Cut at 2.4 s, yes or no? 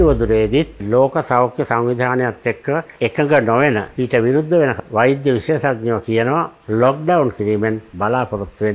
no